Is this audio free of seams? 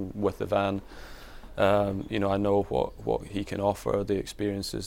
yes; 0 cuts

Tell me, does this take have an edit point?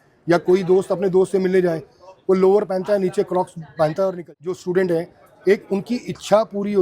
yes; 1 cut; at 4.2 s

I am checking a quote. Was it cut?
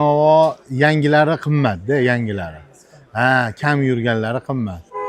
no; 0 cuts

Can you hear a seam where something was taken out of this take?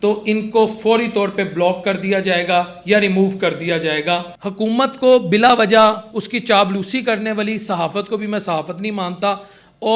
yes; 1 cut; at 4.4 s

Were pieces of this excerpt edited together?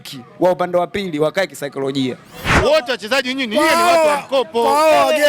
yes; 1 cut; at 2.5 s

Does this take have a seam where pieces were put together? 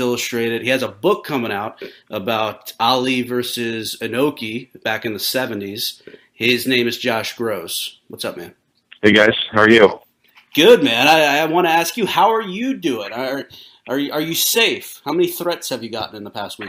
no; 0 cuts

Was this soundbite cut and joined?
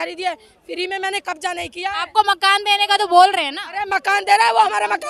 no; 0 cuts

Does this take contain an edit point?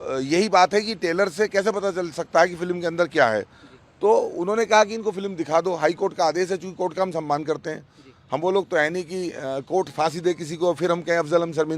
no; 0 cuts

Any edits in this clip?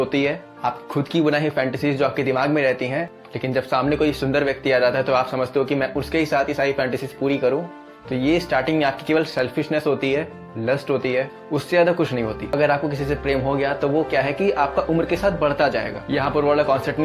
yes; 1 cut; at 12.5 s

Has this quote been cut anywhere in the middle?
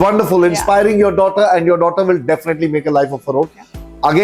no; 0 cuts

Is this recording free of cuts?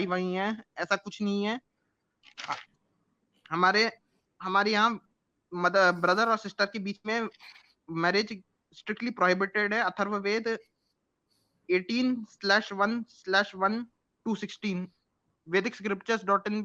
yes; 0 cuts

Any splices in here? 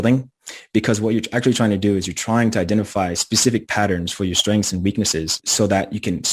yes; 1 cut; at 5.4 s

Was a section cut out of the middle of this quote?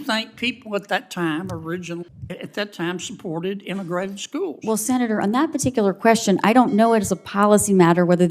yes; 1 cut; at 2.2 s

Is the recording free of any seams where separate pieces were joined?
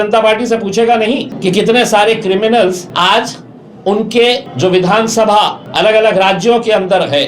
no; 4 cuts; at 1.3 s, 2.9 s, 4.5 s, 5.6 s

